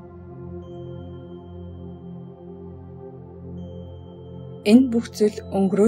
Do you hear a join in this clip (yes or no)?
yes